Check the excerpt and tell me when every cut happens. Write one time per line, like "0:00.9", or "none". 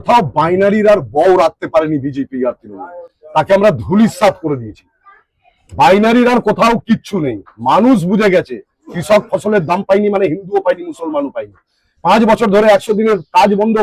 none